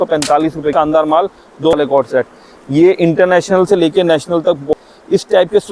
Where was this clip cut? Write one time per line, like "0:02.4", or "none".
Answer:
0:00.7
0:01.8
0:04.7